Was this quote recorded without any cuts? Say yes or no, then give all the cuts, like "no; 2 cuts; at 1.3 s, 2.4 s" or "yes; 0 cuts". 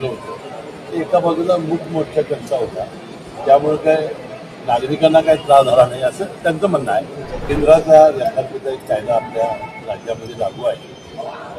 no; 1 cut; at 7.3 s